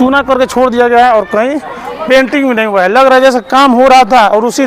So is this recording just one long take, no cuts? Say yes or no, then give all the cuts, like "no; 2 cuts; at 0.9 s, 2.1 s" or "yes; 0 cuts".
yes; 0 cuts